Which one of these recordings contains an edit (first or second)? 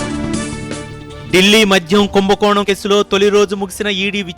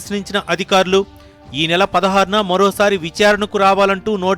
first